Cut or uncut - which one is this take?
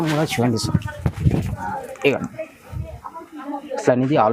uncut